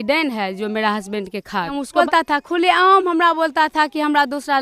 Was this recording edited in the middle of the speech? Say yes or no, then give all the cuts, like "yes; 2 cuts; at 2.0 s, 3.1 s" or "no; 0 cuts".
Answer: yes; 1 cut; at 2.0 s